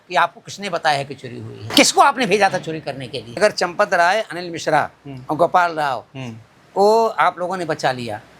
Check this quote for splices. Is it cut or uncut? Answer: cut